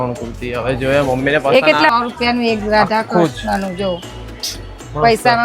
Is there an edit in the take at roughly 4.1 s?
no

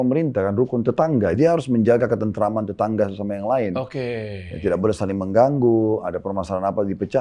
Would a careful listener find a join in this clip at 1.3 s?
yes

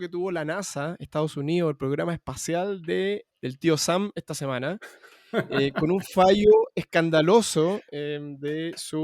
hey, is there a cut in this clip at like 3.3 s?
yes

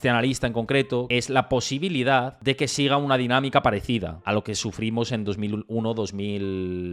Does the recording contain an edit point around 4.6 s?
no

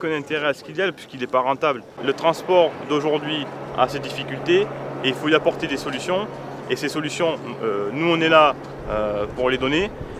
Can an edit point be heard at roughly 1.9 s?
yes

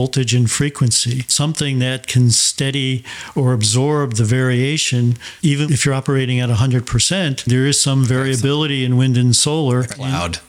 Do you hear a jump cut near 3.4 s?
no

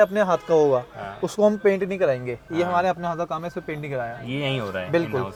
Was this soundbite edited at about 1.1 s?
no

